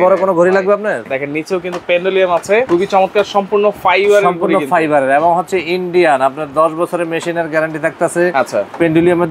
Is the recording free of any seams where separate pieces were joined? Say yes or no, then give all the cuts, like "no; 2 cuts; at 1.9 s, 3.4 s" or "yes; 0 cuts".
no; 2 cuts; at 1.1 s, 2.7 s